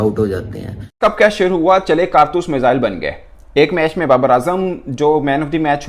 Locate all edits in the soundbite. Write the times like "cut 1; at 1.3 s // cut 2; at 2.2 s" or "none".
cut 1; at 1.0 s